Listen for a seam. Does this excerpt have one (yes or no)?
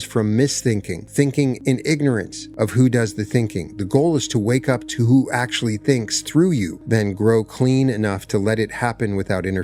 yes